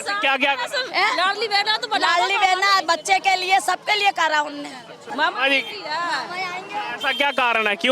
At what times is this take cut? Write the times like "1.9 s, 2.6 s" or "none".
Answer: 5.0 s